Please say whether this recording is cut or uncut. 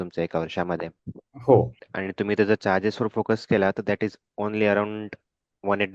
cut